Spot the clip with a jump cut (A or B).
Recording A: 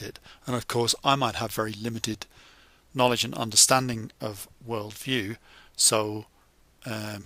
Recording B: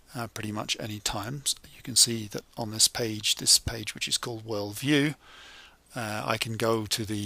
B